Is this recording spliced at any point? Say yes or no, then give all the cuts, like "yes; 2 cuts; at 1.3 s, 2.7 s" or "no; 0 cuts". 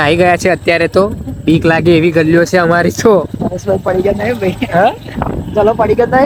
no; 0 cuts